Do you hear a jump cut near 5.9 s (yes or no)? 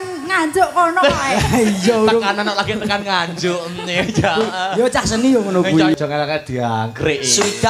yes